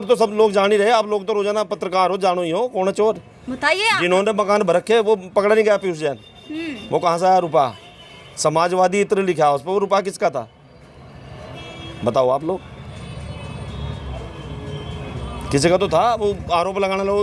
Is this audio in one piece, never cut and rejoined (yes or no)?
yes